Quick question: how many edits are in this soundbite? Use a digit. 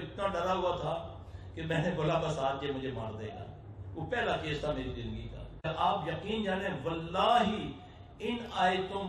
1